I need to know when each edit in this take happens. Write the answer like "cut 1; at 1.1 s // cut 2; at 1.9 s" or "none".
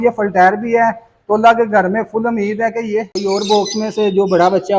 cut 1; at 3.1 s